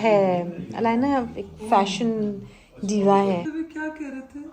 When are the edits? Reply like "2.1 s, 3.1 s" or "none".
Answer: 3.5 s

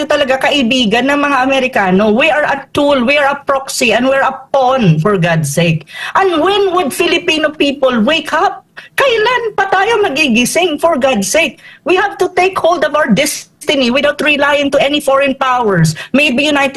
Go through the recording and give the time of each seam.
none

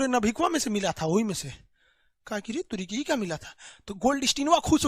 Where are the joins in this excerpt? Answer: none

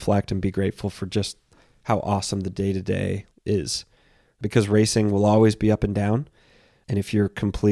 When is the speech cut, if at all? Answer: 3.3 s, 4.3 s, 6.7 s

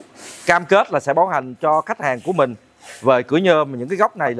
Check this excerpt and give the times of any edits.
none

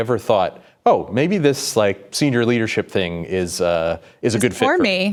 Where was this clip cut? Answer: none

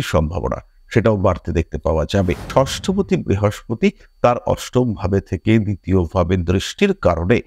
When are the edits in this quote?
2.4 s

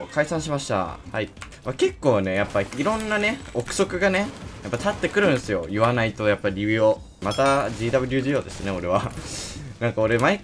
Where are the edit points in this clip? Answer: 1.5 s, 7.2 s

